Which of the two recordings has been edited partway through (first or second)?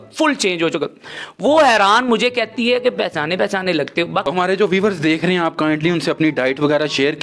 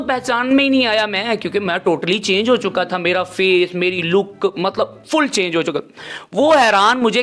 first